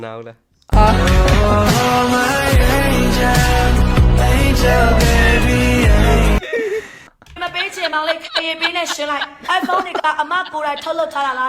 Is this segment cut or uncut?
cut